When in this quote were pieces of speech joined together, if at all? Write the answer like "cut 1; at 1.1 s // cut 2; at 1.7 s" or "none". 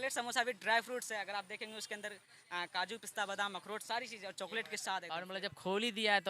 cut 1; at 5.3 s